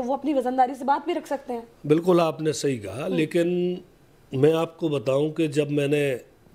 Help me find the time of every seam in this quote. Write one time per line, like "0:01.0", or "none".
none